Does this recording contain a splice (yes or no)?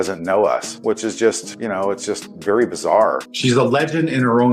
yes